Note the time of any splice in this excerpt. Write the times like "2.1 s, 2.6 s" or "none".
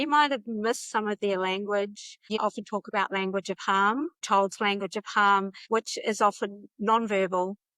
2.3 s, 4.2 s, 5.6 s